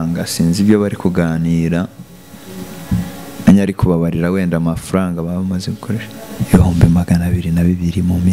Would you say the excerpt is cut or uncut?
cut